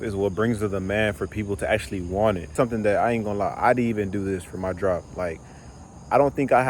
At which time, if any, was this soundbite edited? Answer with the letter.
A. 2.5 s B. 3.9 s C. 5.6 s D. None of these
A